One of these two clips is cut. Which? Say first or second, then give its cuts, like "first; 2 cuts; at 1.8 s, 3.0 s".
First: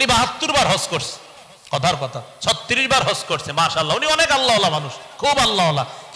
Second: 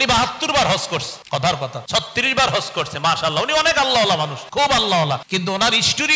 second; 3 cuts; at 1.6 s, 4.4 s, 5.3 s